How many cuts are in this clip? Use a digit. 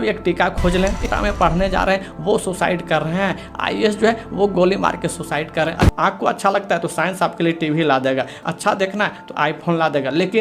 3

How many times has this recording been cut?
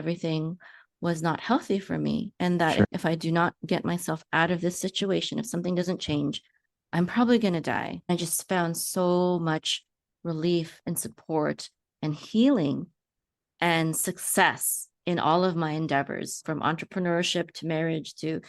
1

